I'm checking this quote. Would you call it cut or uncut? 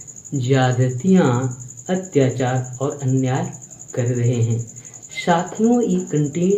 uncut